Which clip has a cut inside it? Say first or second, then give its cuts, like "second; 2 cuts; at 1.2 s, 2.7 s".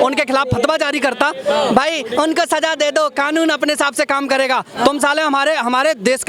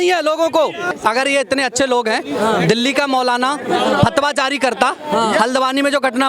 second; 1 cut; at 0.9 s